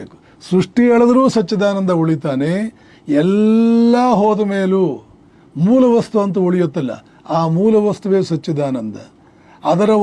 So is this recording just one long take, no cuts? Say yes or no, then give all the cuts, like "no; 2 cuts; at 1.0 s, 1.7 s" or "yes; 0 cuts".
yes; 0 cuts